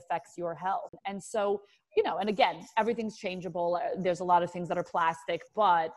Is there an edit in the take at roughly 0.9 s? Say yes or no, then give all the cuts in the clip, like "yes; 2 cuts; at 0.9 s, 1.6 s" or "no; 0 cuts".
yes; 1 cut; at 0.9 s